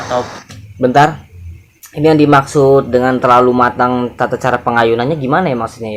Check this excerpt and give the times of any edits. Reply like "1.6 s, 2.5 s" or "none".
none